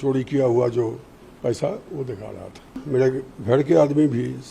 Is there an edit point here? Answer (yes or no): yes